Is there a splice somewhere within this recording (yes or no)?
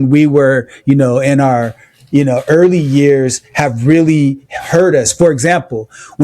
no